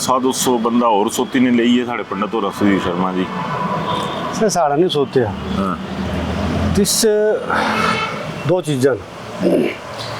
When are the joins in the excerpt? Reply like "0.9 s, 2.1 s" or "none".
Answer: none